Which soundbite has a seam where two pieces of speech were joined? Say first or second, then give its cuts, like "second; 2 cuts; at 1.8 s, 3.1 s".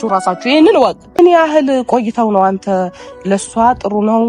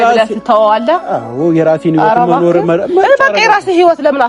first; 1 cut; at 1.2 s